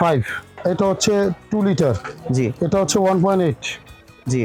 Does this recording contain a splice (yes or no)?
no